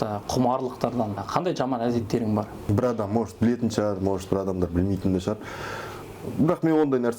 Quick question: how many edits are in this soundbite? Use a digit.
2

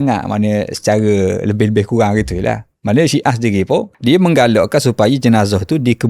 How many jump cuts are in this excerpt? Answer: 1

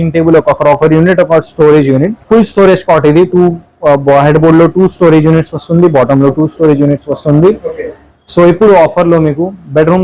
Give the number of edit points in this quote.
1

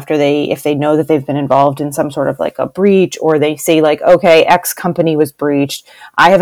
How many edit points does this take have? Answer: 0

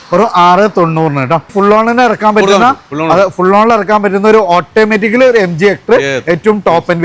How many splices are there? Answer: 1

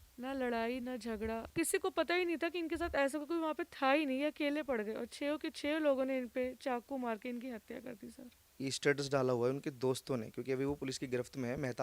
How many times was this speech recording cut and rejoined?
2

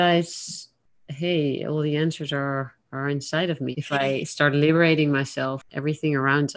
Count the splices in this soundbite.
2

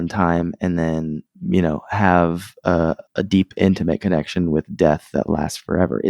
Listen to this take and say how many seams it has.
2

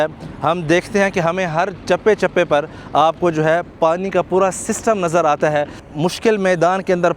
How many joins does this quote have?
1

